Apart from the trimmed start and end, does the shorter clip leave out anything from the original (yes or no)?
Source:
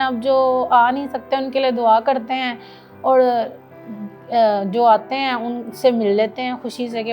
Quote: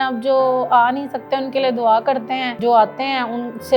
yes